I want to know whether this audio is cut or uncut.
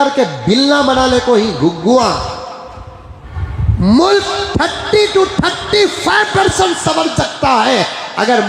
cut